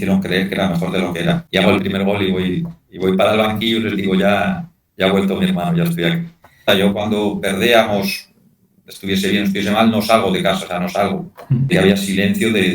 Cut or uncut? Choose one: cut